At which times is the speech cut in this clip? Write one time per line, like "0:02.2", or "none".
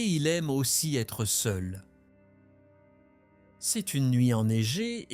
0:01.8
0:03.7